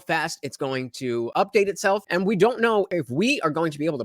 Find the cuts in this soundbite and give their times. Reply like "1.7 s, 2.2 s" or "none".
1.3 s, 2.1 s, 2.9 s